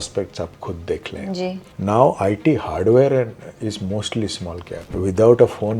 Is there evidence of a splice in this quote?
yes; 2 cuts; at 1.7 s, 4.8 s

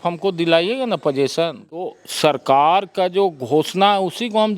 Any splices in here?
yes; 1 cut; at 1.8 s

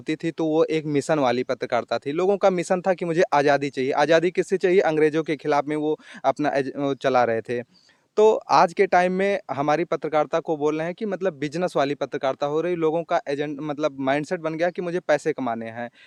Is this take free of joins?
yes; 0 cuts

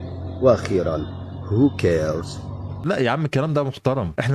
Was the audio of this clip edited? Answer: no; 0 cuts

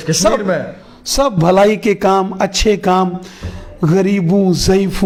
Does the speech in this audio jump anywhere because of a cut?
no; 0 cuts

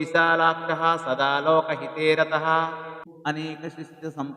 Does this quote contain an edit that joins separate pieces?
yes; 1 cut; at 3.0 s

